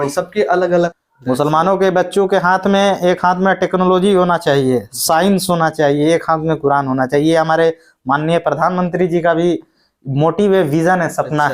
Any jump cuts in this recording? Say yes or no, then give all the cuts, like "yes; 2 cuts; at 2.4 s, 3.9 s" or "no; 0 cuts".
yes; 1 cut; at 1.0 s